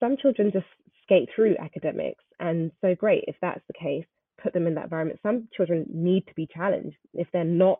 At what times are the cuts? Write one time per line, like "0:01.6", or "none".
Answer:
none